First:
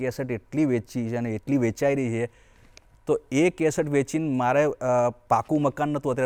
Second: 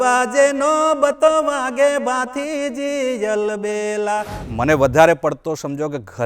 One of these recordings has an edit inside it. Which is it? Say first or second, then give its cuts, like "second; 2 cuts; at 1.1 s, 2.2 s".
second; 1 cut; at 4.4 s